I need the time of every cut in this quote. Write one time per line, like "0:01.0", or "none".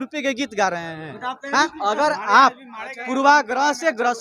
0:01.6